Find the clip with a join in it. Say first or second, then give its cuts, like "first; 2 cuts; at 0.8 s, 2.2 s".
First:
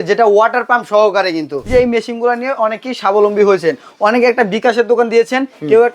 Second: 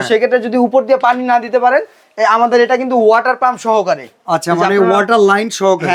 first; 1 cut; at 1.6 s